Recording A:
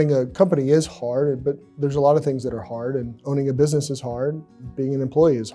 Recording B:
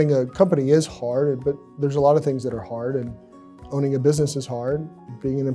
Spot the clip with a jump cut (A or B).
A